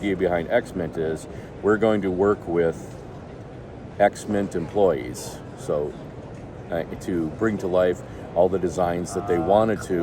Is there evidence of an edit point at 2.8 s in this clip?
no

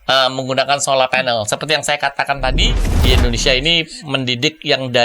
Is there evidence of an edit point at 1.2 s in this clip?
no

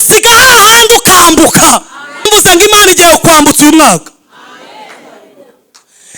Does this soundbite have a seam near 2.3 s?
yes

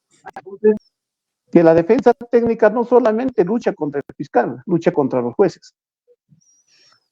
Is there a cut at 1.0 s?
yes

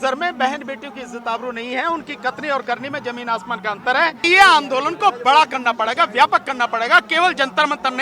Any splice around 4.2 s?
yes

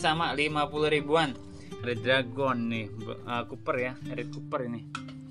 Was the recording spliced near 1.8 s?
yes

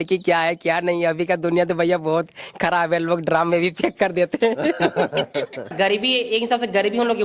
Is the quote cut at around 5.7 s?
yes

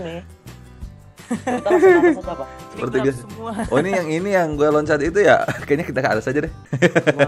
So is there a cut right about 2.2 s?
yes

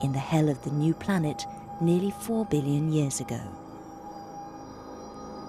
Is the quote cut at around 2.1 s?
yes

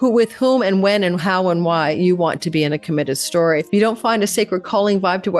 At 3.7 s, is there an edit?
yes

